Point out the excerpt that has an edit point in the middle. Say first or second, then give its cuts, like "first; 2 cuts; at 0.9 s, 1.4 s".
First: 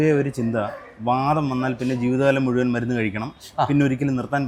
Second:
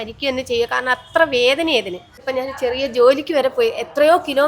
second; 1 cut; at 2.2 s